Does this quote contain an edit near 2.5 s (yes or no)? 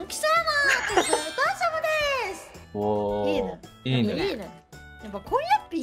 no